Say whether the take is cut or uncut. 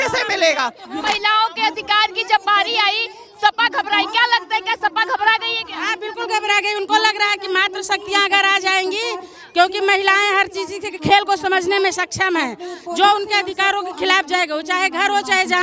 cut